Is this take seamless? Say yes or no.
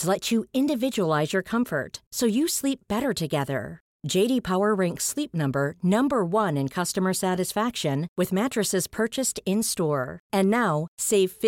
yes